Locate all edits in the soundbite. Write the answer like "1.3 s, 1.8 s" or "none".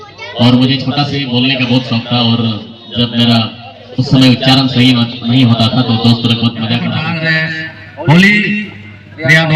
7.1 s